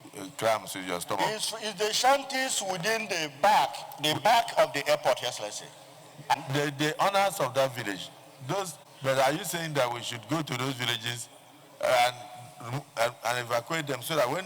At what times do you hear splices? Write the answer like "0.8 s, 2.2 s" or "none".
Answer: 8.8 s

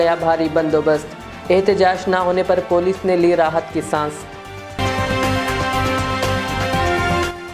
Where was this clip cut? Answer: none

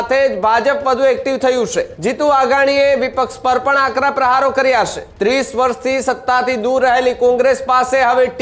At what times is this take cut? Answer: 1.9 s, 5.0 s

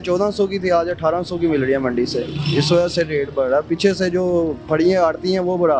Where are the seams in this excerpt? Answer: none

